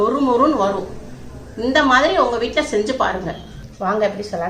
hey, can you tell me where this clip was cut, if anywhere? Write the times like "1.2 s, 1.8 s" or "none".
3.6 s